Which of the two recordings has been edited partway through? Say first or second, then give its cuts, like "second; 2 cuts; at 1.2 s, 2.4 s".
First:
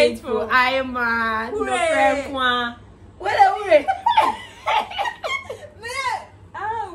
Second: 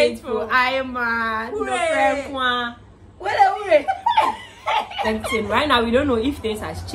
second; 1 cut; at 5.0 s